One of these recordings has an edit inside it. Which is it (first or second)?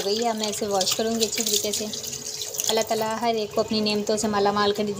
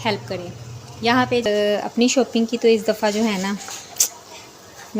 second